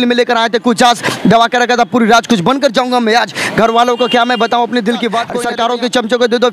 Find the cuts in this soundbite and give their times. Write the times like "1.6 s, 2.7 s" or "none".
5.4 s